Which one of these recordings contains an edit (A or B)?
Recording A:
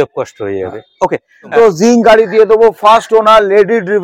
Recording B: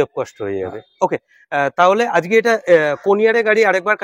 A